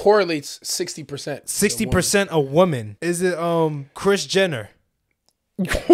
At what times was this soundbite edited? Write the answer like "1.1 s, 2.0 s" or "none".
2.9 s, 3.9 s